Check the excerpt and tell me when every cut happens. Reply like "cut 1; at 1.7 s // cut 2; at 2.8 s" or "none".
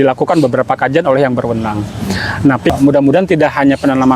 cut 1; at 2.7 s

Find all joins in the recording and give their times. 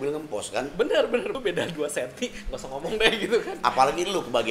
cut 1; at 1.4 s

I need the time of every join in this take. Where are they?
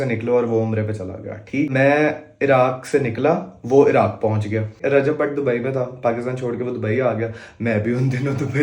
cut 1; at 1.7 s // cut 2; at 4.8 s

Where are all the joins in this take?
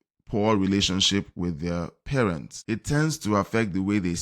cut 1; at 2.5 s

